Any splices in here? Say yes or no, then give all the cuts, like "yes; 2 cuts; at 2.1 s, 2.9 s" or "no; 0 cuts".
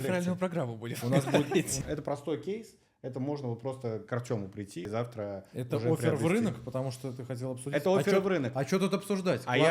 yes; 2 cuts; at 1.7 s, 4.9 s